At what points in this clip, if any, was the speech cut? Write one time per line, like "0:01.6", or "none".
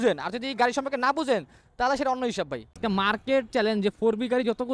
0:02.6